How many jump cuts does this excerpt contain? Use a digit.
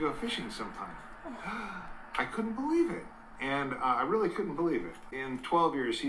1